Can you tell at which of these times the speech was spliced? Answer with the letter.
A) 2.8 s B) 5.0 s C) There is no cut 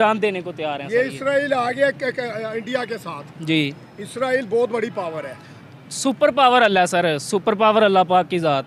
C